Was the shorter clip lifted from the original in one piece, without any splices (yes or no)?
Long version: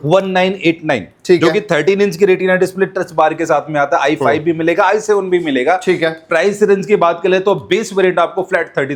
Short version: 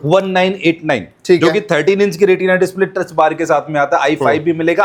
yes